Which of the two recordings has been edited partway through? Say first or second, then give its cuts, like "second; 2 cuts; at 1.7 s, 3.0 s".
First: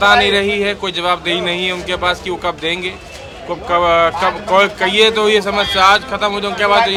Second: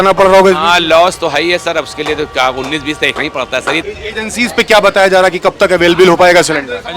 second; 1 cut; at 3.8 s